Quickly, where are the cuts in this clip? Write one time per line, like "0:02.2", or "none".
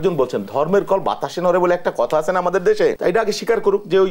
0:03.0